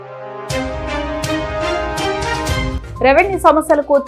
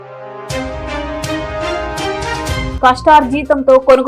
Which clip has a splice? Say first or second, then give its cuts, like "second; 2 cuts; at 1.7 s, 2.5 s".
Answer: first; 1 cut; at 2.7 s